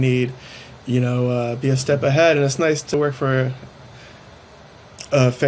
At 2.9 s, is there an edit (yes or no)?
yes